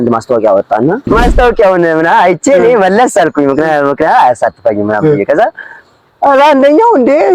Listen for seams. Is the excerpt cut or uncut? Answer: cut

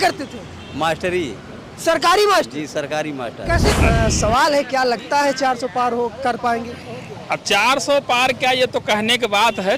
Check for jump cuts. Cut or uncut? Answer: cut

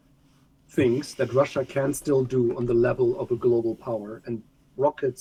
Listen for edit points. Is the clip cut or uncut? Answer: uncut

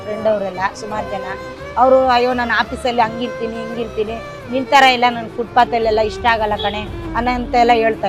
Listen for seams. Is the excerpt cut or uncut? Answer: uncut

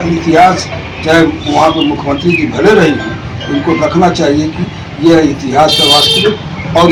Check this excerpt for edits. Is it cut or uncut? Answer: uncut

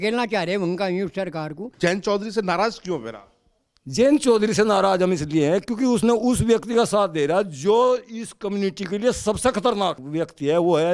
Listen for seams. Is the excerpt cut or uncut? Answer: cut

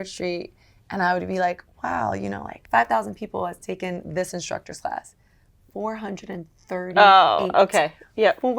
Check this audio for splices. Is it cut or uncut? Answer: cut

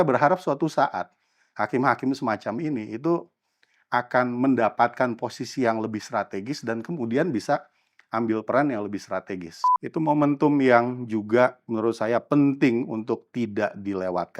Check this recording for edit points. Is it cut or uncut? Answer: cut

